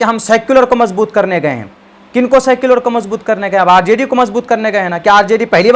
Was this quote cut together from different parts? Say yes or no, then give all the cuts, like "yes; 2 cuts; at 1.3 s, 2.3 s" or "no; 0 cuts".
no; 0 cuts